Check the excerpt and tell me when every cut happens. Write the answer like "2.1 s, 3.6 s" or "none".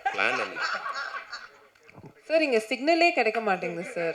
none